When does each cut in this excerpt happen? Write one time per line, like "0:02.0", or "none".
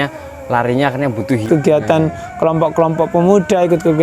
0:01.4